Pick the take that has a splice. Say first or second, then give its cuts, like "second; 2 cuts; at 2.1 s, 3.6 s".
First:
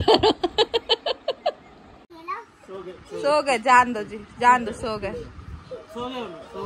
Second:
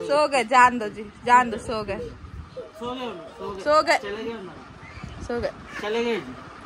first; 1 cut; at 2.2 s